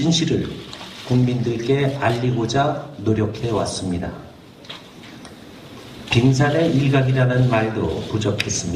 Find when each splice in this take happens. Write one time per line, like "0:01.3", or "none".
0:01.0